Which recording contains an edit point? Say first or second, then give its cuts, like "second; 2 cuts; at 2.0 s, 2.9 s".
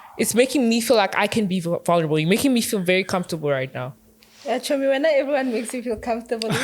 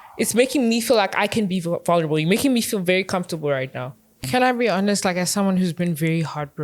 second; 1 cut; at 4.1 s